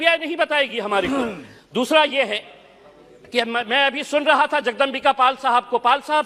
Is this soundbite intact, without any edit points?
yes; 0 cuts

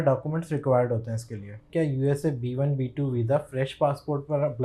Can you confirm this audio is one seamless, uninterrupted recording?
no; 1 cut; at 1.6 s

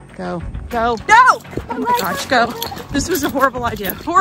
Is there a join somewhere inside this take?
yes; 1 cut; at 1.0 s

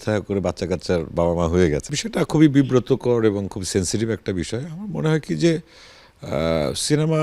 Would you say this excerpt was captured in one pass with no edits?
no; 1 cut; at 1.9 s

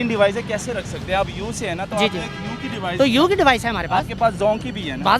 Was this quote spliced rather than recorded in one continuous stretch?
no; 0 cuts

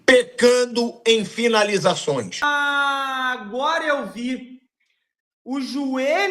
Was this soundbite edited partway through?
yes; 1 cut; at 2.5 s

